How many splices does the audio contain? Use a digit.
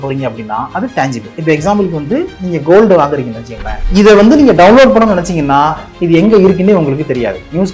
1